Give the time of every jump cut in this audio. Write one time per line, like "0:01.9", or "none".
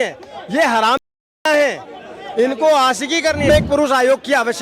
0:03.5